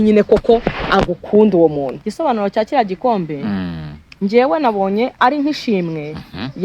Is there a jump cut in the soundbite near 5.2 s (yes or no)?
yes